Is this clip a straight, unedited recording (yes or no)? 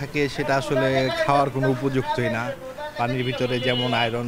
yes